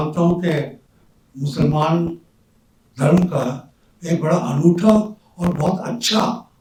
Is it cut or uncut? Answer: uncut